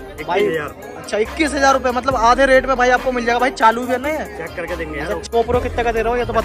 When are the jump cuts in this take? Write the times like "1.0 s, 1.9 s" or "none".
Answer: 5.3 s